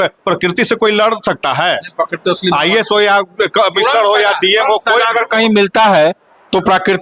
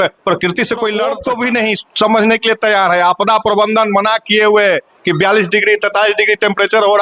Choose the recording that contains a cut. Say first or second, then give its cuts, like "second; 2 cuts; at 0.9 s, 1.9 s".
second; 1 cut; at 1.2 s